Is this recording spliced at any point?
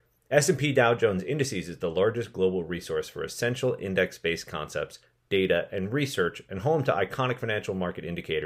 no; 0 cuts

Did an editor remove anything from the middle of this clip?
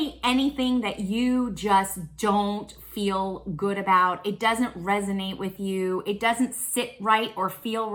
no; 0 cuts

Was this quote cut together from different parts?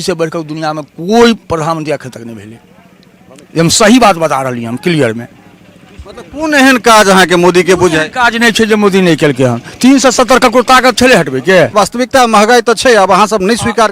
yes; 1 cut; at 11.7 s

